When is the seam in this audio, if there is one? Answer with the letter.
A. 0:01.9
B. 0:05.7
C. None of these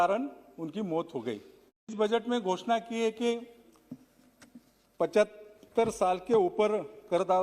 A